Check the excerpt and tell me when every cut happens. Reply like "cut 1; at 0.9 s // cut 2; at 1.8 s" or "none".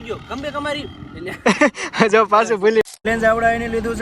cut 1; at 2.8 s